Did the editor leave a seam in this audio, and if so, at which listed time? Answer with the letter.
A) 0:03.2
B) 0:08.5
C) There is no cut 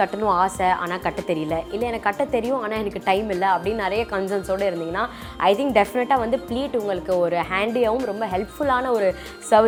C